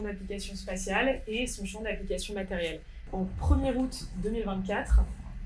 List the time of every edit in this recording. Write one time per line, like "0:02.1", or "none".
0:03.0

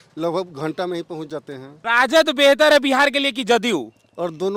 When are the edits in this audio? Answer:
0:01.7

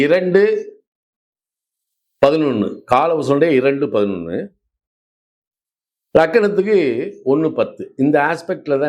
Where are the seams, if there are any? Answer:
none

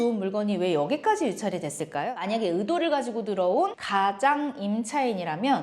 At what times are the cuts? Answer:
0:02.0

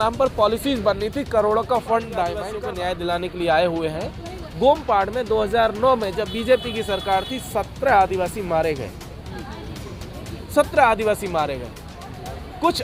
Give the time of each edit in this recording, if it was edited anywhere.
0:02.5

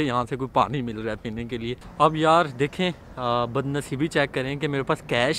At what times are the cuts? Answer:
0:01.8

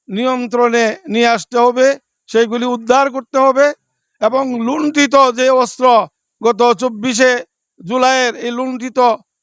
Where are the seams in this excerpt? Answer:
none

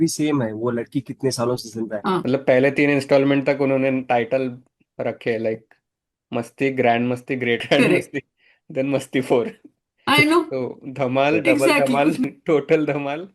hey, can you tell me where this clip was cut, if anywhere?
0:02.2
0:07.6
0:12.2

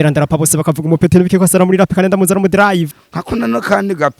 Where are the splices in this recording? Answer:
0:03.0

